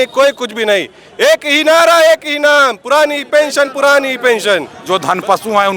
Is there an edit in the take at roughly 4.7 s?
yes; 1 cut; at 4.7 s

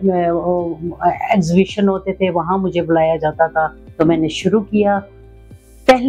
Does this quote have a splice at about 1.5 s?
no; 1 cut; at 3.8 s

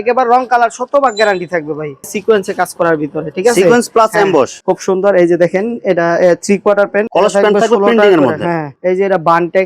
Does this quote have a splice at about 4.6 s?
yes; 3 cuts; at 2.1 s, 4.6 s, 7.1 s

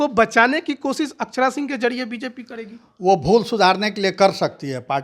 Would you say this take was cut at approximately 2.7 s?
no; 0 cuts

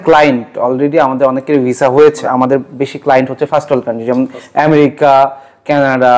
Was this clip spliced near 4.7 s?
no; 1 cut; at 2.2 s

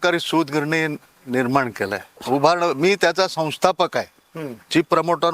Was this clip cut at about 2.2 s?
yes; 1 cut; at 2.2 s

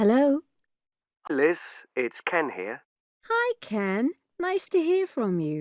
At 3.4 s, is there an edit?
no; 1 cut; at 1.3 s

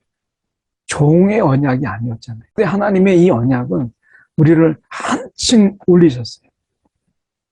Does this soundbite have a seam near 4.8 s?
no; 1 cut; at 2.6 s

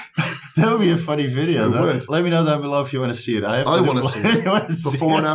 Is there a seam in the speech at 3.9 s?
no; 1 cut; at 2.0 s

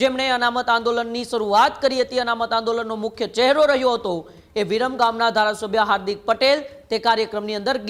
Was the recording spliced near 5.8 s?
no; 0 cuts

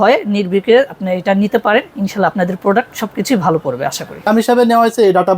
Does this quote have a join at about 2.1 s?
no; 1 cut; at 4.3 s

